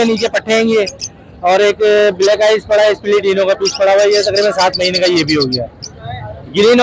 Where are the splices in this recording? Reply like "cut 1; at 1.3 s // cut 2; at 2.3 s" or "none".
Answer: none